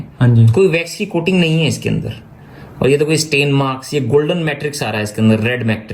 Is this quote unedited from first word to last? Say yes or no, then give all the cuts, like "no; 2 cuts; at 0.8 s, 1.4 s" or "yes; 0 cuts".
yes; 0 cuts